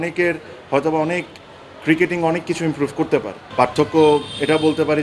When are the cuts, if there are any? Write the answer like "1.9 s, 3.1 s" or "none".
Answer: 3.5 s

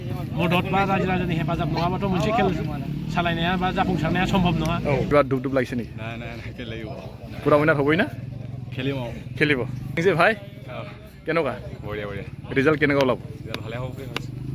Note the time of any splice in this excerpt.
5.1 s, 10.0 s

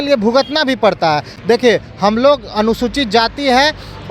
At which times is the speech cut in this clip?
none

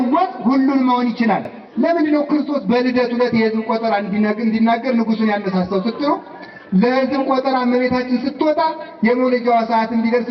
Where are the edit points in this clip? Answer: 1.6 s

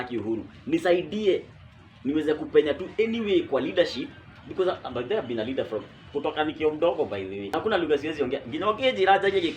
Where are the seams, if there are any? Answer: 7.5 s

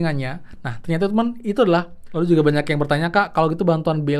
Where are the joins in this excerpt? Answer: 2.0 s

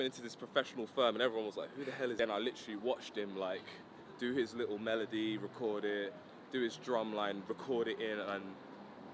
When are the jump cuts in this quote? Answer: 2.2 s

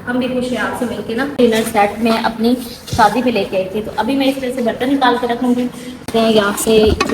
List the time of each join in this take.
1.4 s, 6.0 s

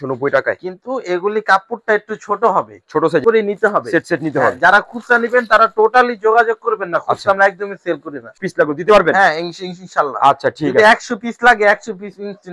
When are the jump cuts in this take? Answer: 3.2 s, 8.4 s

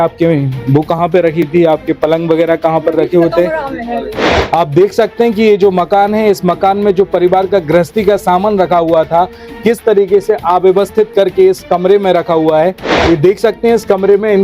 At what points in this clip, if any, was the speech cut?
4.3 s, 12.9 s

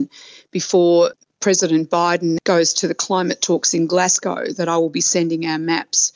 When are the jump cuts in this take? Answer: 2.4 s

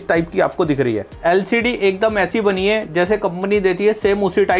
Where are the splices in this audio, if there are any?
1.1 s

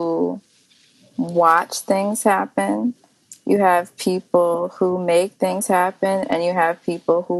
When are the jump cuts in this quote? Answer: none

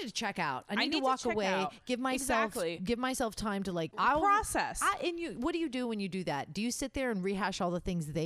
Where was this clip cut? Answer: 3.9 s

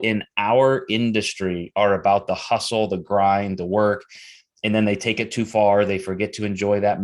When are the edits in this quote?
none

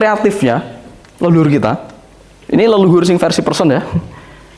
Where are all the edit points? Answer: none

